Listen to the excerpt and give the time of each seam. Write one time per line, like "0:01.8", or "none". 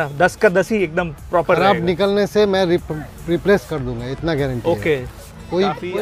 none